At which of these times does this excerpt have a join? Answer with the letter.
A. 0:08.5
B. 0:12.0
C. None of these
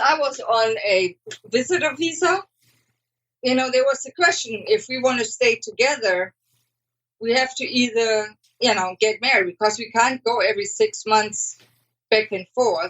C